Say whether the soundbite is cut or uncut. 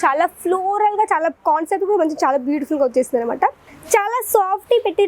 cut